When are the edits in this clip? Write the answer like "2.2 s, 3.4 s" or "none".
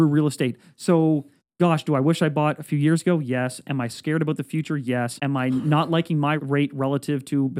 5.2 s, 6.4 s